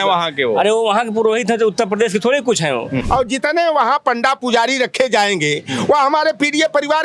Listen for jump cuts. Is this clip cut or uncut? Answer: cut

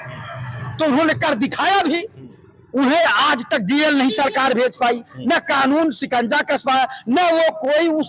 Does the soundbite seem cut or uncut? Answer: uncut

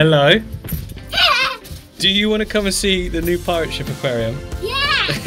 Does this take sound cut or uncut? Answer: uncut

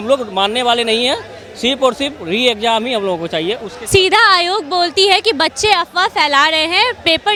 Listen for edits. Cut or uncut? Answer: uncut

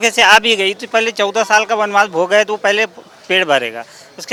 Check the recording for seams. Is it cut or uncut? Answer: uncut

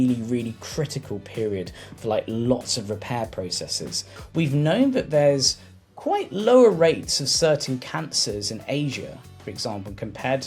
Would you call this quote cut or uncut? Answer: cut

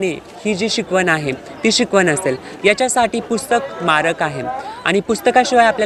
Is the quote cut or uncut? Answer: uncut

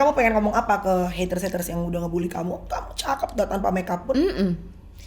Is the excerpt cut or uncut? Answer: uncut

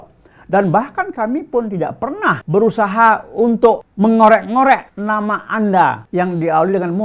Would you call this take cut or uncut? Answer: cut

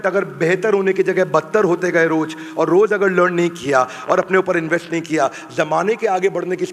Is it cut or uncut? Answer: uncut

